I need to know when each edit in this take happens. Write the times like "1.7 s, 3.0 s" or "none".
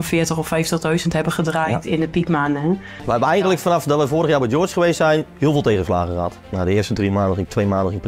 2.9 s, 5.3 s, 6.4 s